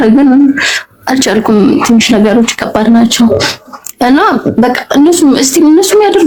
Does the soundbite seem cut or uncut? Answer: uncut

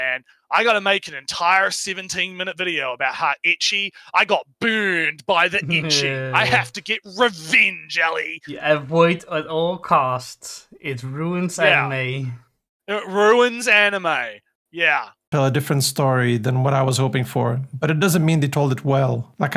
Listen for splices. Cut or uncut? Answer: uncut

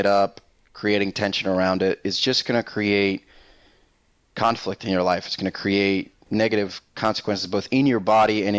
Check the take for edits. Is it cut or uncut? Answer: cut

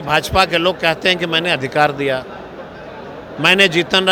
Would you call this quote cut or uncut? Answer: uncut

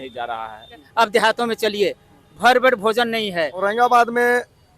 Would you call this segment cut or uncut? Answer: cut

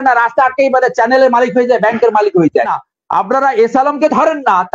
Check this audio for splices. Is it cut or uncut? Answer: cut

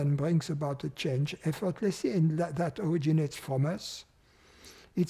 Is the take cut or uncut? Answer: uncut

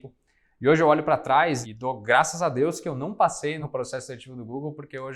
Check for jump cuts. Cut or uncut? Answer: cut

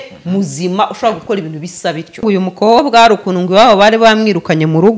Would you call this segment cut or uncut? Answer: cut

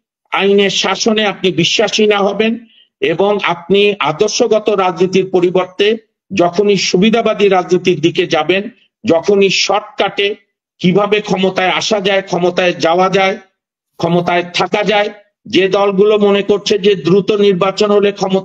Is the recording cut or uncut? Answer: uncut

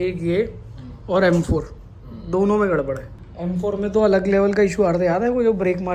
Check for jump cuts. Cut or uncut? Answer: uncut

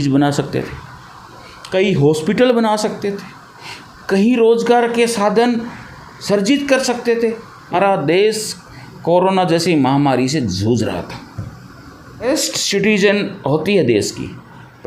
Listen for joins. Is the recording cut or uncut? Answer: cut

